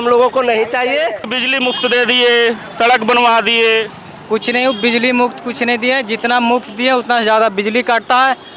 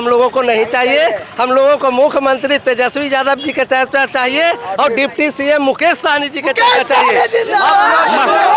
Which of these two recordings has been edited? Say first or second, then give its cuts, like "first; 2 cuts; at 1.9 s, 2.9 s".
first; 1 cut; at 1.3 s